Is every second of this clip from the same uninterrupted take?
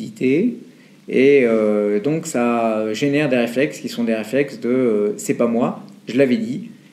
yes; 0 cuts

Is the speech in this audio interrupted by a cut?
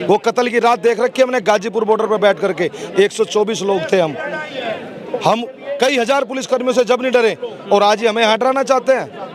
no; 0 cuts

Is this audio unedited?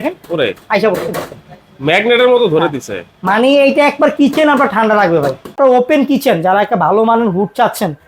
no; 1 cut; at 5.6 s

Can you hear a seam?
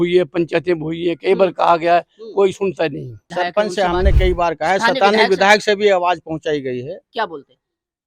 yes; 1 cut; at 3.2 s

